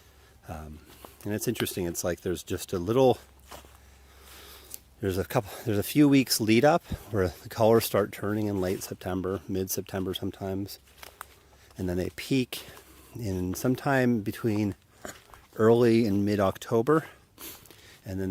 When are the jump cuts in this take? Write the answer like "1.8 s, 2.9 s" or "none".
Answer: 12.8 s

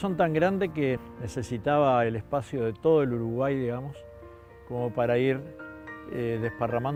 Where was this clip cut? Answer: none

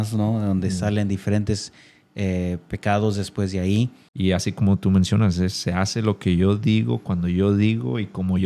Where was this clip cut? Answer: 4.0 s

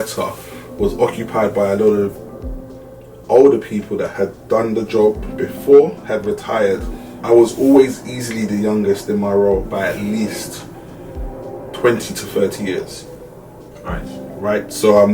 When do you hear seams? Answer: 7.1 s

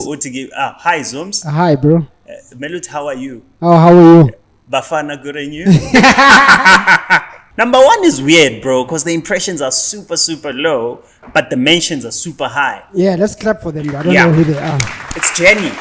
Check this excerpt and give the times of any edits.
7.4 s

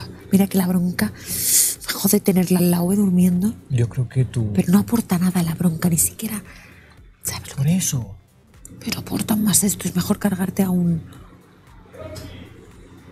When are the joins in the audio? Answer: none

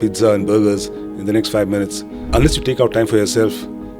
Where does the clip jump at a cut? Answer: 2.1 s

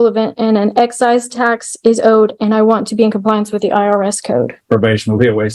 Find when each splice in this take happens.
4.6 s

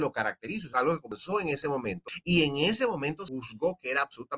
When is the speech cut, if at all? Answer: 0.9 s, 2.1 s, 3.2 s

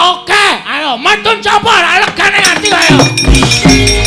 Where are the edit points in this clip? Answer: none

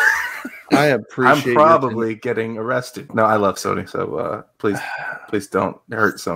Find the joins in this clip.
3.1 s

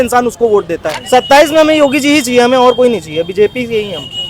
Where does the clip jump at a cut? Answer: 0.9 s

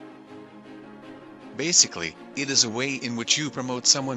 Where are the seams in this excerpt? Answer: 1.2 s

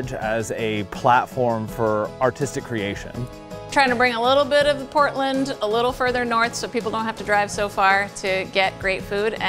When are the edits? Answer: 2.1 s, 3.7 s

